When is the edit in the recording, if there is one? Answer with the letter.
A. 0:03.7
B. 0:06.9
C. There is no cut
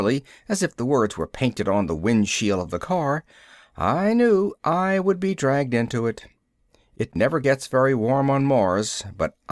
C